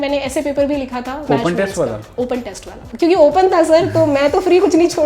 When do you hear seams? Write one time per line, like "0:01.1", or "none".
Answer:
0:01.2